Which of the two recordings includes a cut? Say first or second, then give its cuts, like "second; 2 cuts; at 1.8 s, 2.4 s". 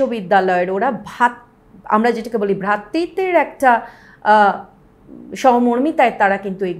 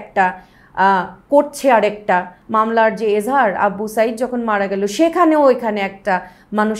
second; 1 cut; at 2.4 s